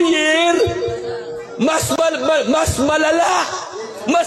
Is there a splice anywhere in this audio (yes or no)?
no